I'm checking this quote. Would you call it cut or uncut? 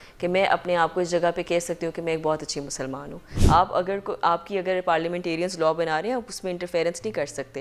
cut